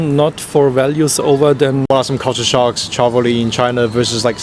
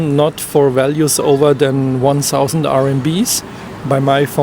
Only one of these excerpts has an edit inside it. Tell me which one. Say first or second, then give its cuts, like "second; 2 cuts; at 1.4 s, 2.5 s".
first; 1 cut; at 1.8 s